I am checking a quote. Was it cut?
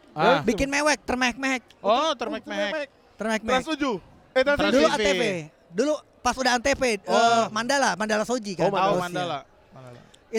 no; 0 cuts

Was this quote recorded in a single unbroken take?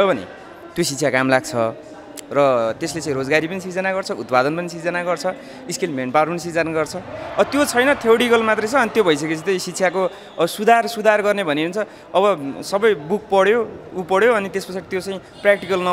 yes; 0 cuts

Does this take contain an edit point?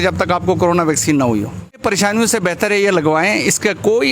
yes; 1 cut; at 1.8 s

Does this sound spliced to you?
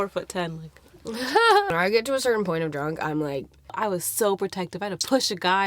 yes; 2 cuts; at 1.7 s, 3.7 s

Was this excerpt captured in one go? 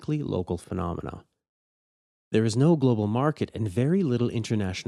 yes; 0 cuts

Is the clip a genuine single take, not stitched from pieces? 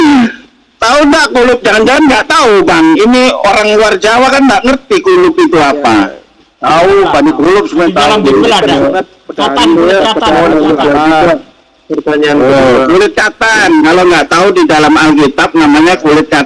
yes; 0 cuts

